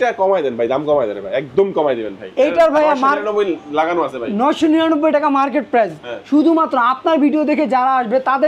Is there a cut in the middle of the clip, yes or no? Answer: no